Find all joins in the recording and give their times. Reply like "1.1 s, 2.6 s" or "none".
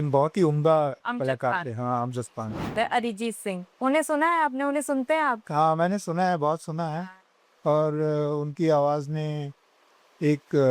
2.7 s

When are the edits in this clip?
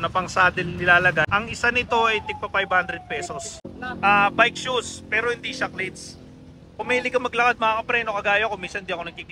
1.2 s, 3.6 s

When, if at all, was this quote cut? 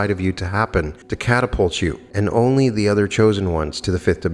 1.1 s, 2.0 s

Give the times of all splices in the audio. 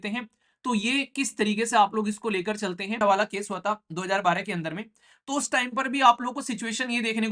3.0 s

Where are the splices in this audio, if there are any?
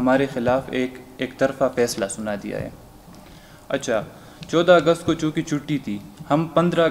none

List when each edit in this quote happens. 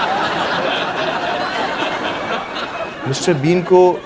3.1 s

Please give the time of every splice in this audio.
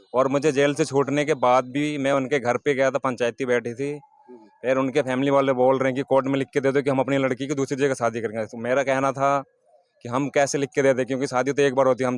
none

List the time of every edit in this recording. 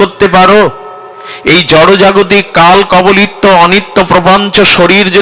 none

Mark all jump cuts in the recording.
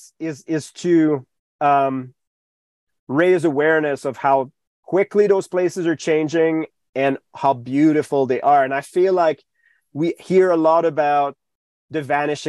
none

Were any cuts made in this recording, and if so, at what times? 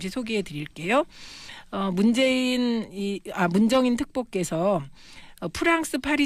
4.2 s

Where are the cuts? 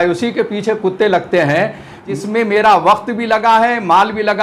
2.1 s

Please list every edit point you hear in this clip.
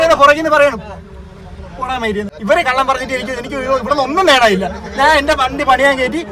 2.3 s

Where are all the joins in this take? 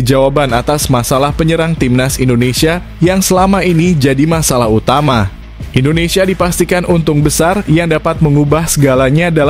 none

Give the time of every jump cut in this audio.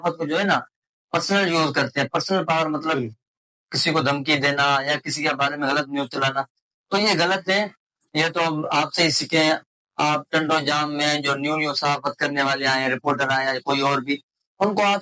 none

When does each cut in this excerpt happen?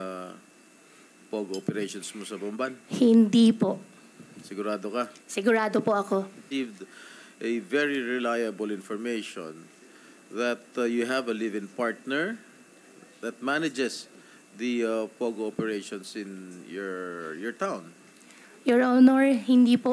6.5 s

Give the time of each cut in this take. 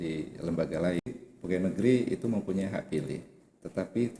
1.0 s

